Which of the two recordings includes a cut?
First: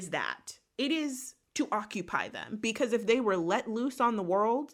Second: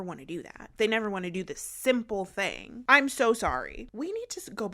second; 2 cuts; at 2.7 s, 3.8 s

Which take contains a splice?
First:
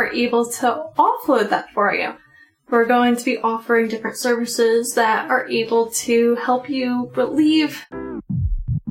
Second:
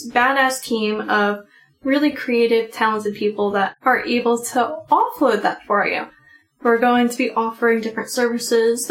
first; 1 cut; at 7.8 s

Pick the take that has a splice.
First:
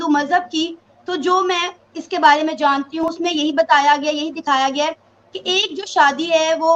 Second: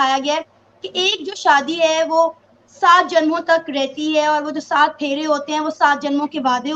first; 1 cut; at 3.1 s

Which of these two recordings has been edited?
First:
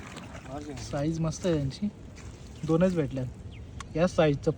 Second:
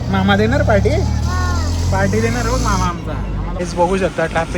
second; 1 cut; at 3.6 s

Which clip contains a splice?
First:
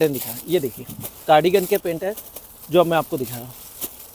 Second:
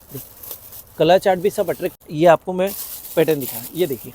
second; 1 cut; at 2.0 s

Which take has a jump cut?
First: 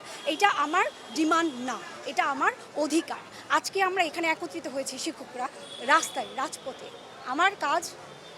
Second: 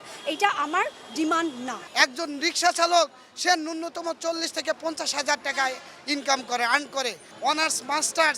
second; 2 cuts; at 1.8 s, 7.3 s

